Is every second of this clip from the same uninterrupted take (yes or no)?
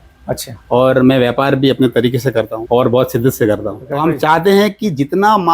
no